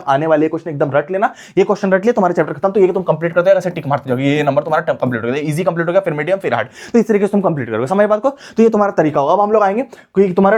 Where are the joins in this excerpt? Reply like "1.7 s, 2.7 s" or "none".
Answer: none